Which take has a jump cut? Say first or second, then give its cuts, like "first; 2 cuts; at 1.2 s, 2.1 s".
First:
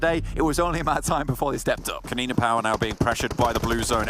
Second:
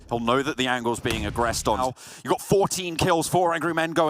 second; 1 cut; at 1.8 s